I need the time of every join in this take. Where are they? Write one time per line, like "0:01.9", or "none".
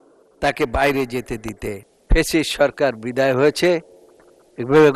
0:01.9